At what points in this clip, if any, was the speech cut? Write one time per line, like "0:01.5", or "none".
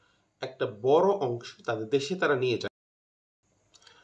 0:02.7